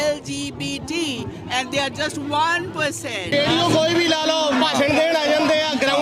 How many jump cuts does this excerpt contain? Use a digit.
1